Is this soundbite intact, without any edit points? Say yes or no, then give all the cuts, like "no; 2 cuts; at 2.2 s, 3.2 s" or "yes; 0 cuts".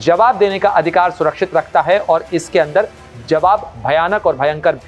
yes; 0 cuts